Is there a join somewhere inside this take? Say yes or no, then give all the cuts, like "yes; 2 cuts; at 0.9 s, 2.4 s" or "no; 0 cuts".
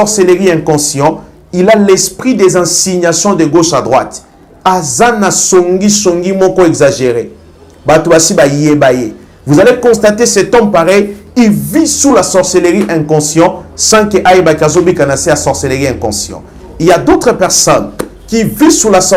no; 0 cuts